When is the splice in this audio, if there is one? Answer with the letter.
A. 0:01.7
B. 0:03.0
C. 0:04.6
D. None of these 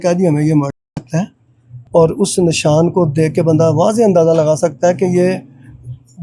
A